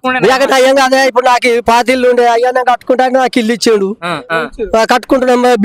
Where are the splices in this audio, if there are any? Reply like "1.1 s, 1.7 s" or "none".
4.2 s